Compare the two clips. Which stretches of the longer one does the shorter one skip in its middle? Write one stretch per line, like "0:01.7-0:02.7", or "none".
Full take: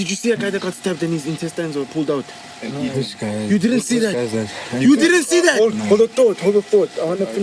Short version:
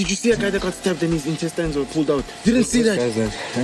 0:02.4-0:03.6